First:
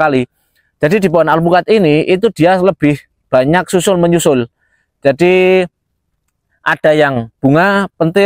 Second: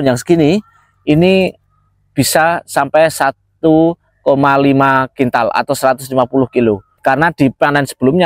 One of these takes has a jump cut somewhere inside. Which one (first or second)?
second